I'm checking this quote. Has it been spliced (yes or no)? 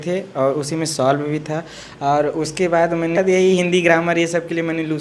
yes